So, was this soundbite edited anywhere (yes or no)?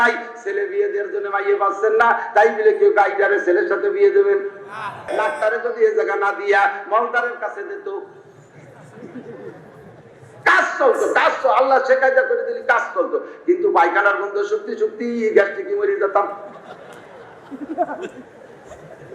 yes